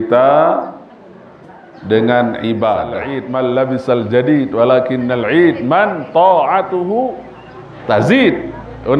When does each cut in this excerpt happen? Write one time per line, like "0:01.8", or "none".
0:03.2